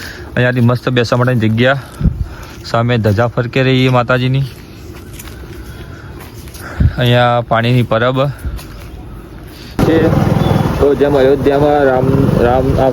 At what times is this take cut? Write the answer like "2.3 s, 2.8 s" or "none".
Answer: 9.8 s